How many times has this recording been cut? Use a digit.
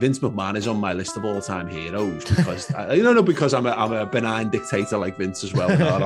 1